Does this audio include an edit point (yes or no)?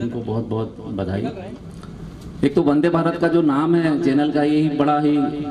yes